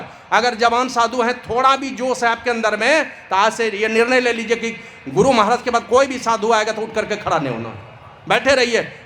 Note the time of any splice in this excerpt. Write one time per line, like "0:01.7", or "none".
none

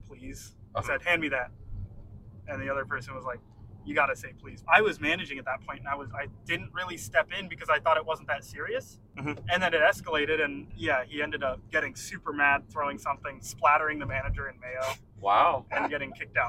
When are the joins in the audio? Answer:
0:04.5
0:06.4
0:09.0
0:10.7
0:11.6

